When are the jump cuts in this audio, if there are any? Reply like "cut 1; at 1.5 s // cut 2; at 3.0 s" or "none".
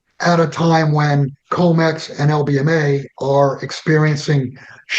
cut 1; at 1.4 s